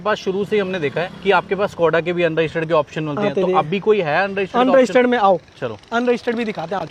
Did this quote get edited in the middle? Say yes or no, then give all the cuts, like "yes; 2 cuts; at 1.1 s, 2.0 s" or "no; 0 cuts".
no; 0 cuts